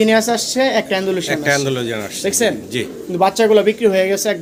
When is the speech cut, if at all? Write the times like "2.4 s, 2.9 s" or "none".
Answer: none